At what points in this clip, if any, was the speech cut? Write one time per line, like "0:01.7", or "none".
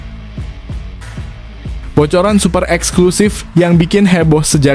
0:00.9
0:01.9